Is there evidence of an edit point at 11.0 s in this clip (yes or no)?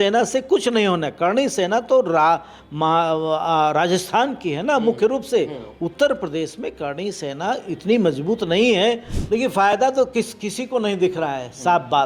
no